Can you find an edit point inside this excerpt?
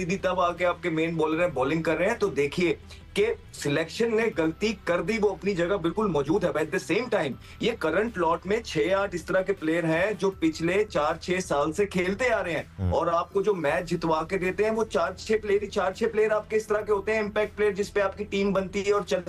no; 0 cuts

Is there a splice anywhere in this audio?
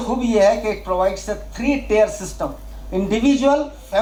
no; 0 cuts

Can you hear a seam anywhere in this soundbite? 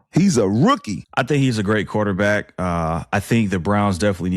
yes; 1 cut; at 1.0 s

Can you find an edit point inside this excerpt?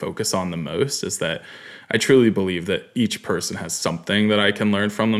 no; 0 cuts

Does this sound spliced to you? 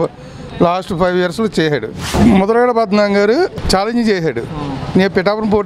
yes; 2 cuts; at 2.1 s, 3.6 s

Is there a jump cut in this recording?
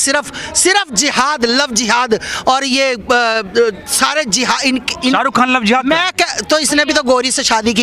no; 0 cuts

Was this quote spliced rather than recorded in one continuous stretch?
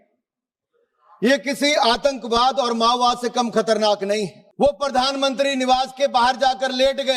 yes; 1 cut; at 4.4 s

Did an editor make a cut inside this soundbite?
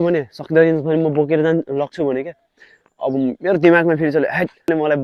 no; 0 cuts

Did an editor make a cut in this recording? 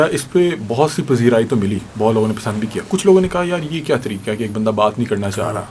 no; 0 cuts

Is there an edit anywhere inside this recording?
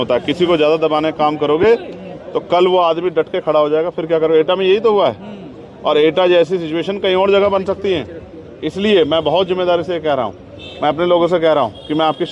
no; 0 cuts

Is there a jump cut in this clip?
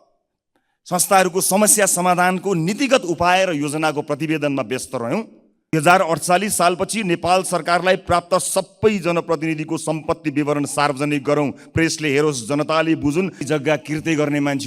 yes; 2 cuts; at 5.7 s, 13.4 s

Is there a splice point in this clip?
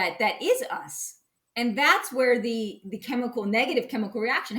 no; 0 cuts

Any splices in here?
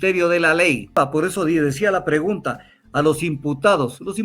yes; 1 cut; at 1.0 s

